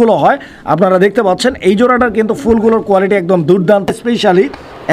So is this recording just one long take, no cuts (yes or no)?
no